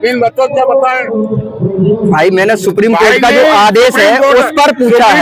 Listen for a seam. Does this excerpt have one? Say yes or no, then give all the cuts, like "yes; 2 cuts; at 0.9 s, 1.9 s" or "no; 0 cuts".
no; 0 cuts